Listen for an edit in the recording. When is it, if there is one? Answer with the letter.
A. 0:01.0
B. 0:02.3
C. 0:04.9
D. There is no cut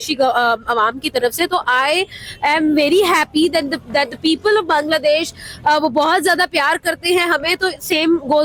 D